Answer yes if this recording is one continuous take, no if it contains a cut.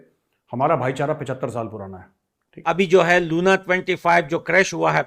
no